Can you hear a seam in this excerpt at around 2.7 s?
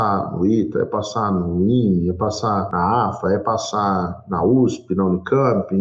yes; 1 cut; at 2.7 s

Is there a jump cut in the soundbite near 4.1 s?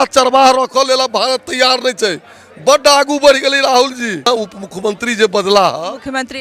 yes; 1 cut; at 4.1 s

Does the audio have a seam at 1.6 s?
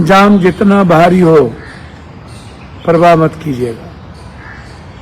no; 0 cuts

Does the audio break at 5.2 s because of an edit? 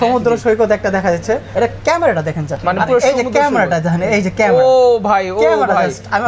no; 2 cuts; at 1.5 s, 2.6 s

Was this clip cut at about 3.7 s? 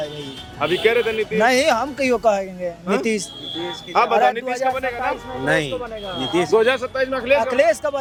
no; 0 cuts

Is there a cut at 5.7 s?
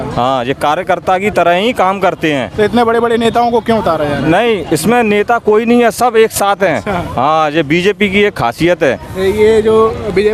no; 0 cuts

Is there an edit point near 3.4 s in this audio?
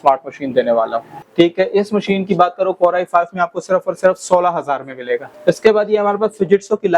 no; 2 cuts; at 1.2 s, 5.3 s

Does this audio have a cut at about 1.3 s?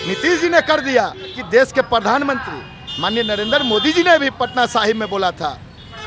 yes; 1 cut; at 1.3 s

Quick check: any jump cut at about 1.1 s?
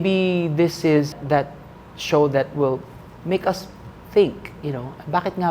yes; 1 cut; at 1.1 s

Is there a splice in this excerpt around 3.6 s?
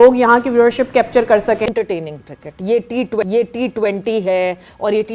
no; 1 cut; at 1.6 s

